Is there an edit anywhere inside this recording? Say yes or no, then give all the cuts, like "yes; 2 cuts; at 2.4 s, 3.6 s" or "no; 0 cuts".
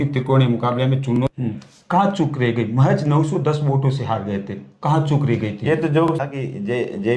yes; 2 cuts; at 1.2 s, 6.1 s